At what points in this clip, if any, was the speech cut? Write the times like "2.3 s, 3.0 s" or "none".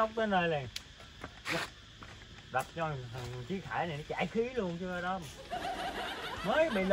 none

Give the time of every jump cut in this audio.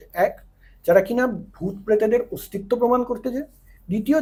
none

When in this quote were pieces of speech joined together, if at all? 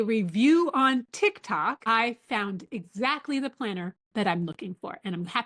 none

